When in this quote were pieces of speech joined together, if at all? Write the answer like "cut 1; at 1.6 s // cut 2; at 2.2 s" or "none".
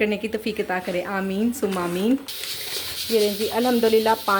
cut 1; at 2.2 s

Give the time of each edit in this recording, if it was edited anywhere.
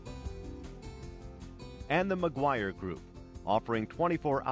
cut 1; at 1.8 s

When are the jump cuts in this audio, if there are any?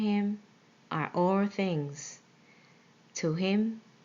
cut 1; at 1.3 s

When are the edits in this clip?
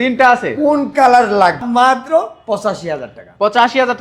cut 1; at 1.7 s

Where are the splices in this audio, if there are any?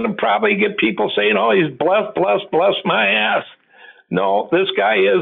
none

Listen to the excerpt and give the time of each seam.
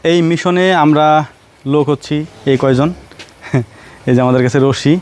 none

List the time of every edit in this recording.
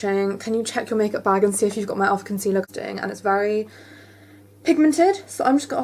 cut 1; at 2.7 s

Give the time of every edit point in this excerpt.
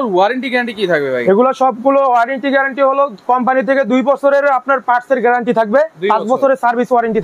none

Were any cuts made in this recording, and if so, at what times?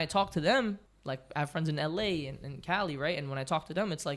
cut 1; at 0.9 s

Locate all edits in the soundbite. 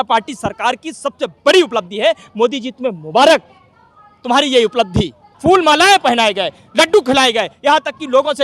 cut 1; at 5.2 s

